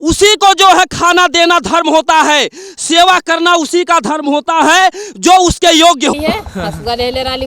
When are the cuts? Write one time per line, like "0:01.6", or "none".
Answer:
0:06.1